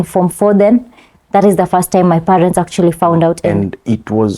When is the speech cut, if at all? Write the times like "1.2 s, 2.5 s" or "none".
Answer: 3.5 s